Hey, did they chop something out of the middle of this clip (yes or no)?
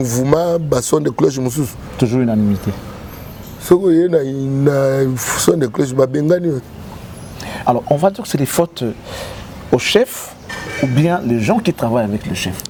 no